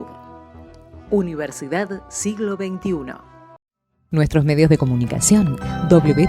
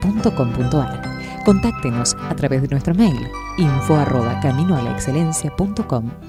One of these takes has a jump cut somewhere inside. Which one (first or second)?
first